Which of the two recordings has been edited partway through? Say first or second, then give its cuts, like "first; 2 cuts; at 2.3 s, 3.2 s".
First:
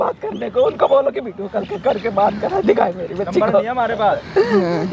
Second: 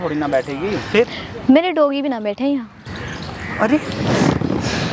second; 1 cut; at 2.8 s